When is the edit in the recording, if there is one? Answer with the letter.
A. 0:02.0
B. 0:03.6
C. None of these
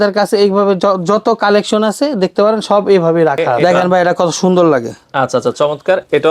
B